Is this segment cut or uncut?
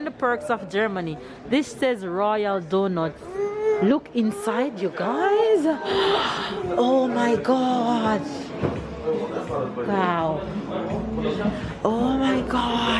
uncut